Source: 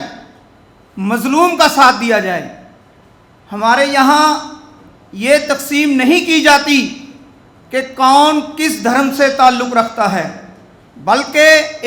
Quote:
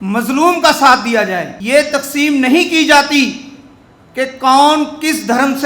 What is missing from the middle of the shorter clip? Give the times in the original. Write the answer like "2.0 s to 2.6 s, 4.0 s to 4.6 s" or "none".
2.5 s to 5.1 s